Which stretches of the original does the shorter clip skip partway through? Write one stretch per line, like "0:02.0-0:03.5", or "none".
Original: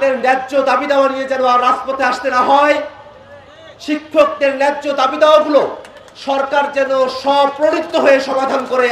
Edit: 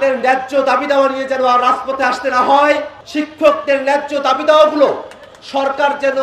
0:03.0-0:03.7